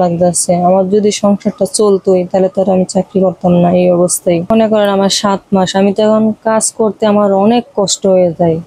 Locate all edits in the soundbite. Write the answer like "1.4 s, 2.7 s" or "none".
4.5 s